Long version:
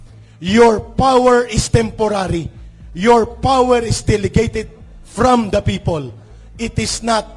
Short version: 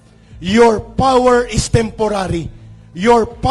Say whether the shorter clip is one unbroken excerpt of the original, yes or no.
yes